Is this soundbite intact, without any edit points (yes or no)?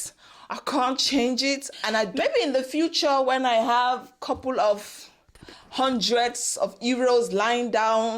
no